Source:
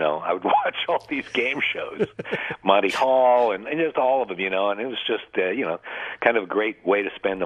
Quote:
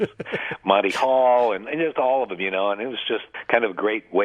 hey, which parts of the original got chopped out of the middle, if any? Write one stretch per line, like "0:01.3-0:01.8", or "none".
0:05.3-0:06.0